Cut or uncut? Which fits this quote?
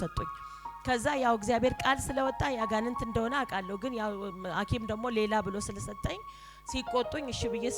uncut